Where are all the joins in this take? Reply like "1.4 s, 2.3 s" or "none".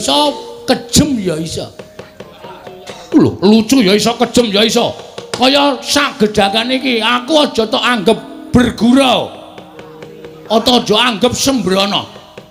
none